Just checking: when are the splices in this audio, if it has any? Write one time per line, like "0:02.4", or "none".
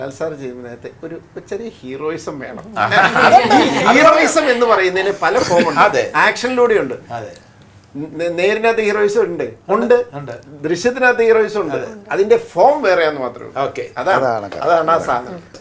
none